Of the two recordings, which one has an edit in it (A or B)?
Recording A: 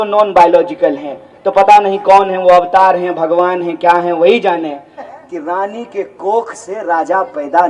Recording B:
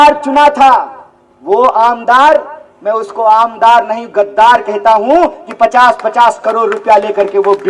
A